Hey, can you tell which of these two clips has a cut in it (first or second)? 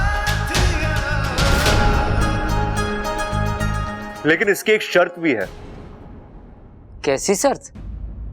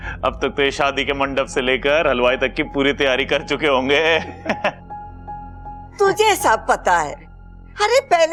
first